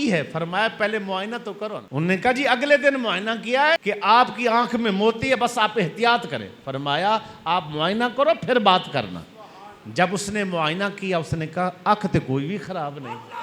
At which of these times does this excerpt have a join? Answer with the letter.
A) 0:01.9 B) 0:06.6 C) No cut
A